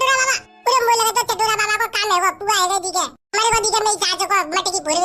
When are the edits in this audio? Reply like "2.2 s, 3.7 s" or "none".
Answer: none